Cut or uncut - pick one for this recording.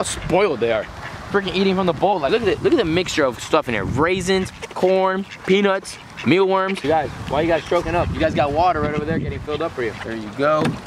cut